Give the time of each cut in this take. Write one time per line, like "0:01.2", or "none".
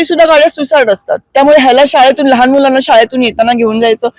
none